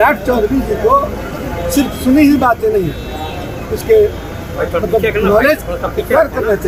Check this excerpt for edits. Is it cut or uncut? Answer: uncut